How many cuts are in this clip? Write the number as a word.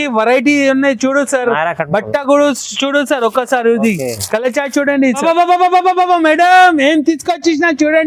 one